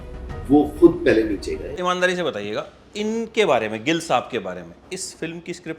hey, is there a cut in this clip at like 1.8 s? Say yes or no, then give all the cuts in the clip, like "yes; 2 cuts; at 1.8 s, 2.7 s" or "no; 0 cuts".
yes; 1 cut; at 1.8 s